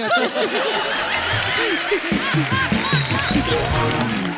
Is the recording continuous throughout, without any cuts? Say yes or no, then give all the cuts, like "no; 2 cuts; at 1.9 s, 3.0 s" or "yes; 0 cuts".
yes; 0 cuts